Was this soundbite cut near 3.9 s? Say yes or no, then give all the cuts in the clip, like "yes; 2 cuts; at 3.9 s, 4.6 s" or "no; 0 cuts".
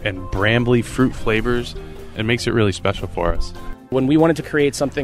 yes; 2 cuts; at 2.1 s, 3.9 s